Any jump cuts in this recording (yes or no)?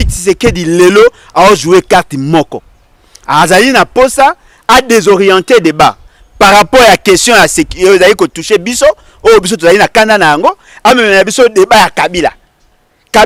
no